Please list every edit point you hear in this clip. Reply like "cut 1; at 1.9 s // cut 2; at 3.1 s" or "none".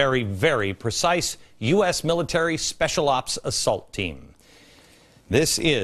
none